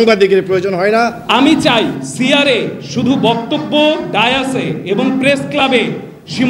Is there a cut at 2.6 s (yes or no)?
no